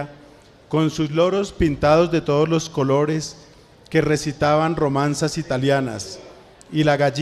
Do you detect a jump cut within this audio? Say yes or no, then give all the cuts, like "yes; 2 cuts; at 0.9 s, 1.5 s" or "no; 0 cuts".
yes; 1 cut; at 5.3 s